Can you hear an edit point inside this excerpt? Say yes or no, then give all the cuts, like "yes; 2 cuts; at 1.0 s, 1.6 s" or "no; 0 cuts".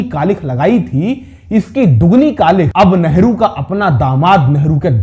yes; 1 cut; at 2.7 s